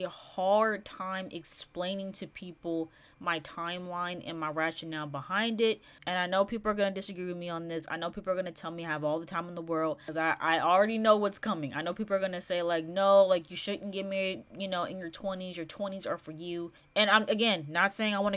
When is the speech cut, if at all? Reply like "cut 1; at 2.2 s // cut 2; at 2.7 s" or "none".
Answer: cut 1; at 5.9 s // cut 2; at 10.0 s // cut 3; at 16.8 s